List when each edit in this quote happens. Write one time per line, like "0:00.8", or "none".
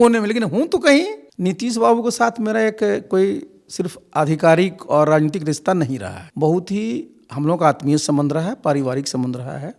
0:01.2
0:06.2